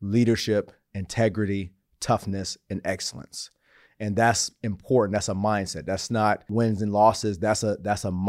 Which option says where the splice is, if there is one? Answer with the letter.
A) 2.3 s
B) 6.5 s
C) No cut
B